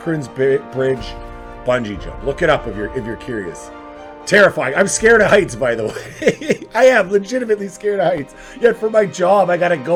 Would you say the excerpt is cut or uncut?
uncut